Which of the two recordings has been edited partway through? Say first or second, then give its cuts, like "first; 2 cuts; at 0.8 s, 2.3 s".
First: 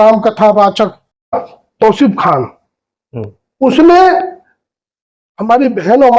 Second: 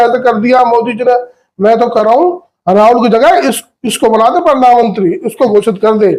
first; 1 cut; at 1.3 s